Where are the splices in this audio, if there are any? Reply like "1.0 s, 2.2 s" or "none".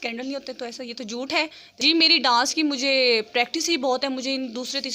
1.6 s